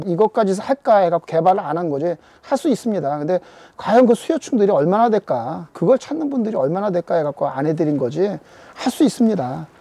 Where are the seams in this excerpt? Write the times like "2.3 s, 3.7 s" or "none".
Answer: none